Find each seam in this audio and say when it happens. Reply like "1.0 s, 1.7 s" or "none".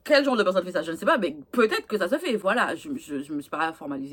none